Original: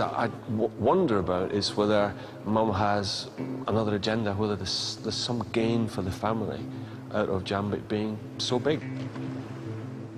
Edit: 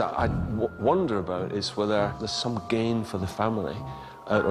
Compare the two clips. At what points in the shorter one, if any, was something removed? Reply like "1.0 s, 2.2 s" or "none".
2.2 s

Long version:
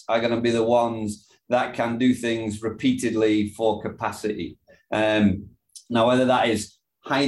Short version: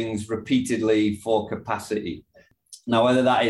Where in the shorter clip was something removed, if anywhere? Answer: 2.4 s

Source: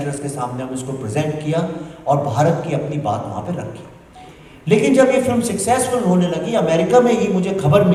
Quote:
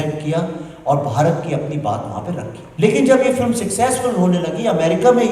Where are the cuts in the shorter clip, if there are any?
2.6 s

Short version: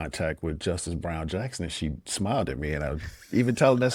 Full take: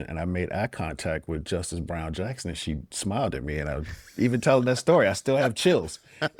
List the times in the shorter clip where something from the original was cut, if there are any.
none

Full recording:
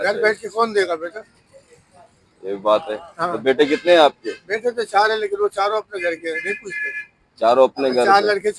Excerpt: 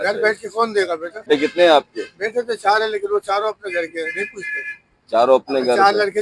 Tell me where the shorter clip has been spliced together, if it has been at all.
1.3 s

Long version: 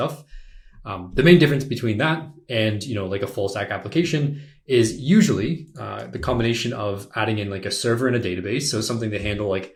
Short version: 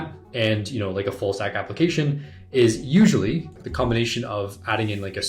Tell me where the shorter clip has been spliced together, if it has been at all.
3.6 s

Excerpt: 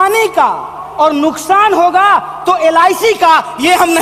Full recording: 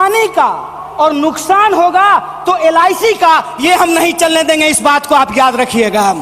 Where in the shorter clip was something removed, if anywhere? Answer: none

